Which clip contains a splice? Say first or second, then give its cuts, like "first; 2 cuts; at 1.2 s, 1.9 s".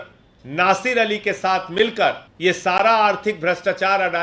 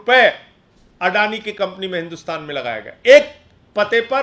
first; 1 cut; at 2.3 s